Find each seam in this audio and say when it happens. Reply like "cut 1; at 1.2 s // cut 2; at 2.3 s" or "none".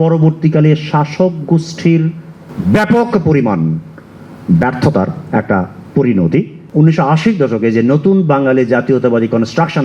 cut 1; at 6.6 s